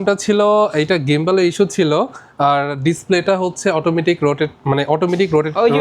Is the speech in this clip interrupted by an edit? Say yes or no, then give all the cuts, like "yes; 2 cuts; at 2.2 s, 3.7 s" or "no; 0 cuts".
no; 0 cuts